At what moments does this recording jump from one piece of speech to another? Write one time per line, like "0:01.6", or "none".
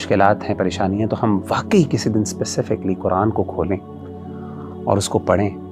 none